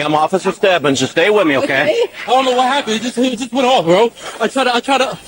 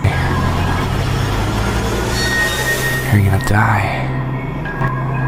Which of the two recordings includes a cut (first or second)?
first